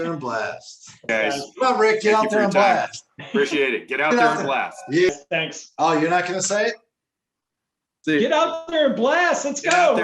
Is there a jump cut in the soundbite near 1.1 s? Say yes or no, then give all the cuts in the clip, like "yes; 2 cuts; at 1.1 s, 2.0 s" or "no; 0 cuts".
yes; 2 cuts; at 1.1 s, 5.1 s